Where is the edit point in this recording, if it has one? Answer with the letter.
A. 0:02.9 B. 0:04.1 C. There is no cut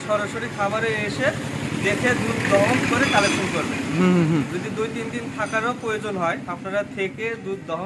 C